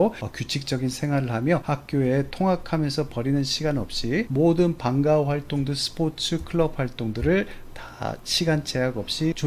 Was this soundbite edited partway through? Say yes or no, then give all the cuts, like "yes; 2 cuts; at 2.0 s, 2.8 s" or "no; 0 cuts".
no; 0 cuts